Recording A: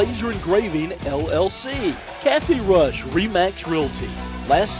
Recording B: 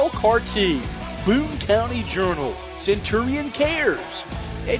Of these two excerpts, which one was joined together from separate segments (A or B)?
A